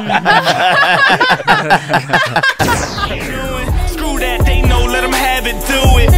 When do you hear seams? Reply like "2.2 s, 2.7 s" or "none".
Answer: 3.2 s